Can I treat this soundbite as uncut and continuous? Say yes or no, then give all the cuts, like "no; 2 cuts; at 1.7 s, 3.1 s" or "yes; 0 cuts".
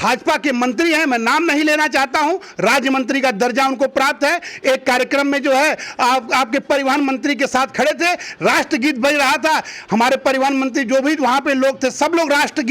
yes; 0 cuts